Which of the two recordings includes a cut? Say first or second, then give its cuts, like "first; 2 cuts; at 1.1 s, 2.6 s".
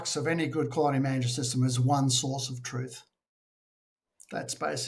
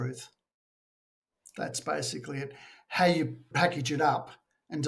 second; 1 cut; at 3.5 s